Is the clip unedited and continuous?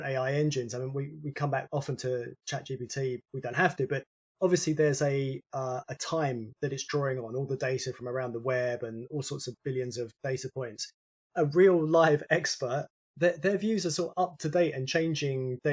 no; 3 cuts; at 3.2 s, 6.5 s, 13.0 s

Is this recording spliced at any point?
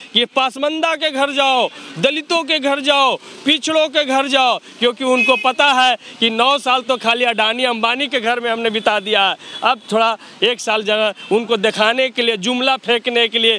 no; 0 cuts

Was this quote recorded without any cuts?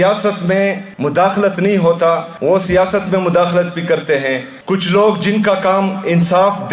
no; 3 cuts; at 0.9 s, 2.3 s, 4.5 s

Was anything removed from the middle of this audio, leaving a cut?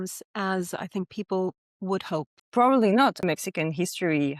yes; 2 cuts; at 2.4 s, 3.2 s

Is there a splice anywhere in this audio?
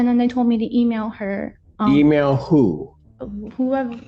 no; 0 cuts

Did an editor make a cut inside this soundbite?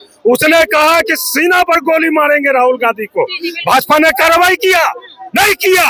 no; 0 cuts

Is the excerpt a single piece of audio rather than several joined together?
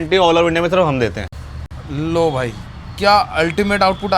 yes; 0 cuts

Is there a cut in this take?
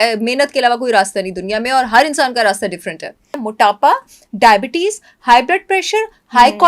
yes; 1 cut; at 3.4 s

